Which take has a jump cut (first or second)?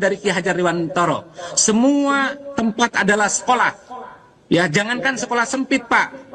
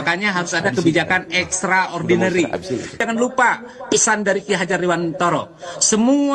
second